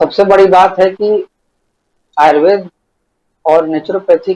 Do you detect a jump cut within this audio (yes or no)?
no